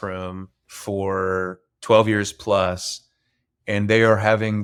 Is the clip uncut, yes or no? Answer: yes